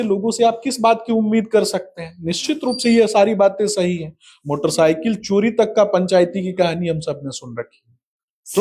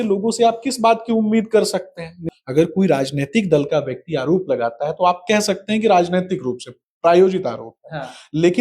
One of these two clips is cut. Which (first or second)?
second